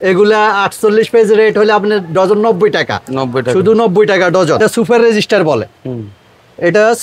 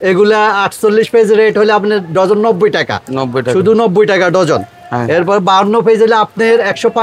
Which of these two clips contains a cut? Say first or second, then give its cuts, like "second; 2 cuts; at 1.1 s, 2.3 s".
first; 1 cut; at 4.6 s